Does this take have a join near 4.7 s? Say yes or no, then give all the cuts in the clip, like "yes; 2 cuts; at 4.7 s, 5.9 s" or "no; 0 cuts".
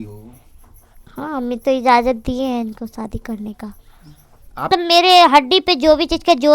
yes; 1 cut; at 4.7 s